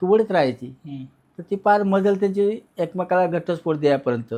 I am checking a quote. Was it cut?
no; 0 cuts

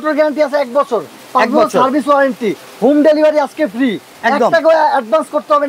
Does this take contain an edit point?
no; 0 cuts

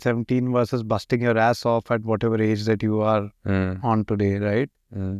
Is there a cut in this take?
no; 0 cuts

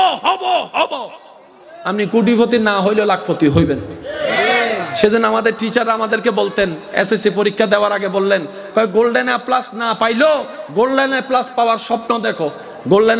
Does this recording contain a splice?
no; 0 cuts

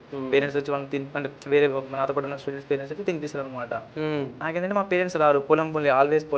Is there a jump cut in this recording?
no; 0 cuts

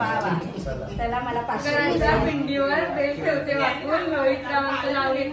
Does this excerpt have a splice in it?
yes; 1 cut; at 1.6 s

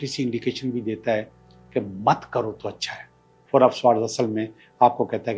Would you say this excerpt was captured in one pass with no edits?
no; 1 cut; at 3.3 s

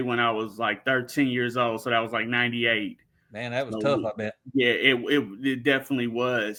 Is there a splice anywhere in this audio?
no; 0 cuts

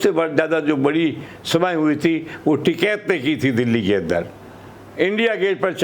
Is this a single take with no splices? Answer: yes; 0 cuts

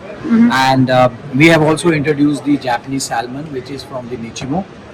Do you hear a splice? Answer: no; 0 cuts

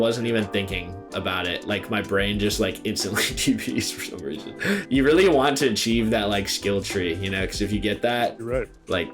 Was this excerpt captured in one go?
no; 1 cut; at 4.8 s

